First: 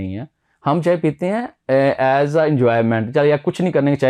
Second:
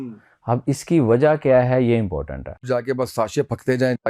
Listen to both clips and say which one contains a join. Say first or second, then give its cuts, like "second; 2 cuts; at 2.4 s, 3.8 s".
second; 1 cut; at 2.6 s